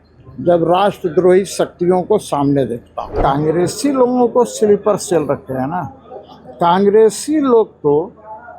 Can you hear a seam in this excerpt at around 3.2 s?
yes; 1 cut; at 3.2 s

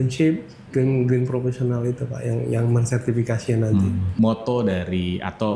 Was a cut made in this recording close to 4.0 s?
yes; 1 cut; at 4.0 s

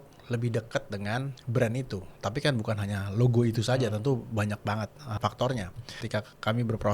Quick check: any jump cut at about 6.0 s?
yes; 3 cuts; at 1.4 s, 5.2 s, 6.0 s

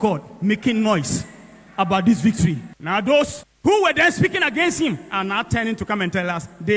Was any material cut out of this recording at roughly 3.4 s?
yes; 2 cuts; at 2.7 s, 3.4 s

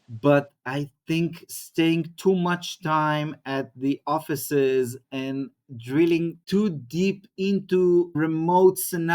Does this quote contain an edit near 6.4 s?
no; 2 cuts; at 1.5 s, 8.1 s

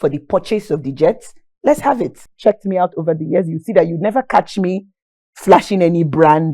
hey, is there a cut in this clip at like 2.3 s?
yes; 1 cut; at 2.3 s

